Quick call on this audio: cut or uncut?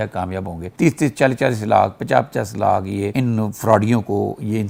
uncut